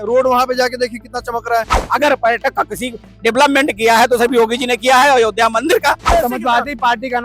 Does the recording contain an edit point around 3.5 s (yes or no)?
no